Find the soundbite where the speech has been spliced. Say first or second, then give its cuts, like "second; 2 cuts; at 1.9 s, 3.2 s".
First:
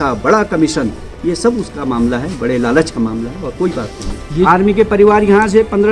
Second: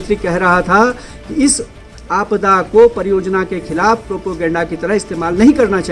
first; 1 cut; at 4.4 s